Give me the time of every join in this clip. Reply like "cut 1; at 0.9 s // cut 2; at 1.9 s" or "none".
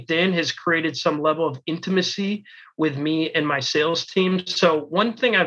none